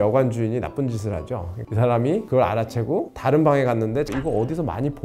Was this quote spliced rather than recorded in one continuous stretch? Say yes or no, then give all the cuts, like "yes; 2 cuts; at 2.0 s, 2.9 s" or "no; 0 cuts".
yes; 2 cuts; at 1.7 s, 4.1 s